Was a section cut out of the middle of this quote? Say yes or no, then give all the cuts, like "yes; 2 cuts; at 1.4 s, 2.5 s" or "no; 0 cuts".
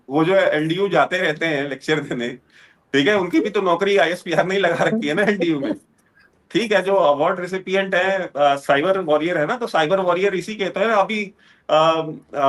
yes; 1 cut; at 6.3 s